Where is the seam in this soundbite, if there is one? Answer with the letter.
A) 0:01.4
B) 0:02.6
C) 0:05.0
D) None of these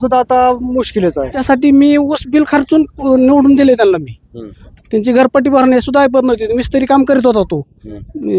A